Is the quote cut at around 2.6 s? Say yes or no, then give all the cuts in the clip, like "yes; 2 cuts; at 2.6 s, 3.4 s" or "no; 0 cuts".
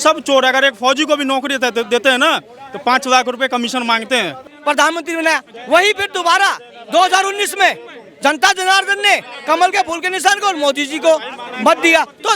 no; 1 cut; at 4.5 s